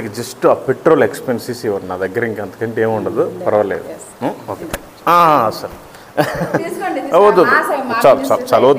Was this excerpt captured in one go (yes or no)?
yes